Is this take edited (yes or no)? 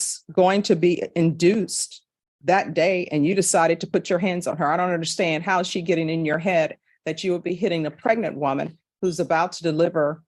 no